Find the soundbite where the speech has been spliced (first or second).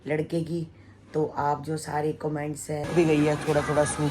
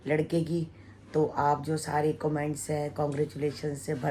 first